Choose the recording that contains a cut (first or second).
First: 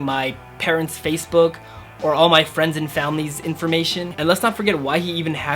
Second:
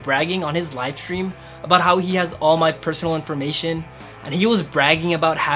first